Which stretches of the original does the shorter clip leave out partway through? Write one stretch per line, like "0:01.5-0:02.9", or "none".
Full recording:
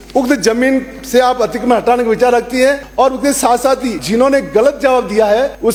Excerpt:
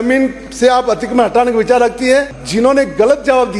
0:02.9-0:03.9